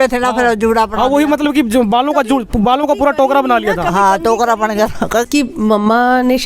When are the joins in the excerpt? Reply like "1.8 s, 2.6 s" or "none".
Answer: 5.2 s